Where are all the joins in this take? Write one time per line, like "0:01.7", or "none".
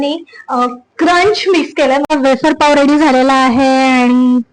0:02.1